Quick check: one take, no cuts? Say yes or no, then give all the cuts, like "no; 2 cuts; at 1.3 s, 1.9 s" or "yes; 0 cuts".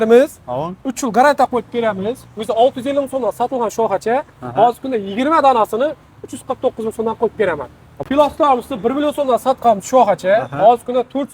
no; 1 cut; at 8.0 s